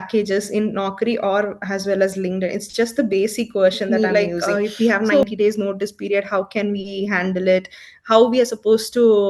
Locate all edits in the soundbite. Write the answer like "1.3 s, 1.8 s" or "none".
4.5 s